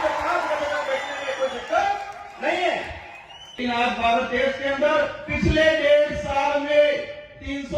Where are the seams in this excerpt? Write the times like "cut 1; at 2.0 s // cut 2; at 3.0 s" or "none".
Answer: cut 1; at 3.6 s